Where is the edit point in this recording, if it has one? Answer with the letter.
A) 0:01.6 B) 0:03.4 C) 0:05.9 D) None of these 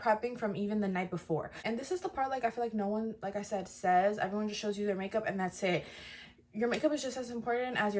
A